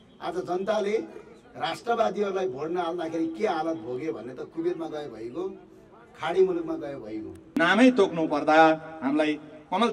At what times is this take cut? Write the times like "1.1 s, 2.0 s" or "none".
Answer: 7.4 s